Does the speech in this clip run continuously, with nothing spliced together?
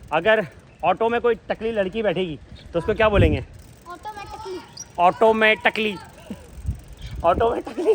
yes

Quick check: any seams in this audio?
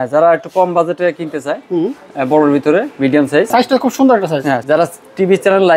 yes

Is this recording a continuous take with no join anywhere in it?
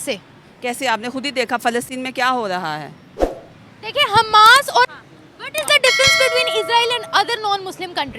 no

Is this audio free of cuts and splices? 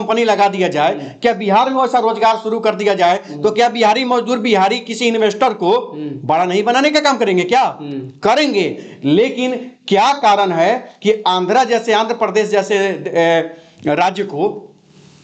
yes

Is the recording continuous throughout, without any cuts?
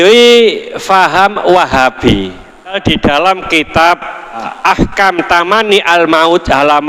no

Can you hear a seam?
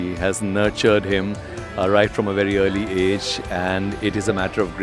no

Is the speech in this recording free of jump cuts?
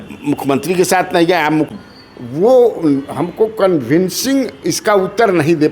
no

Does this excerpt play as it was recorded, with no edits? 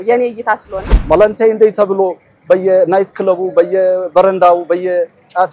no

